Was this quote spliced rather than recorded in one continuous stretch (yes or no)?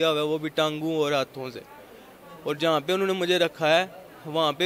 no